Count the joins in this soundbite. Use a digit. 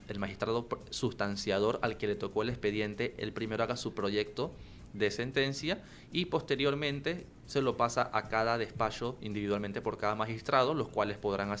0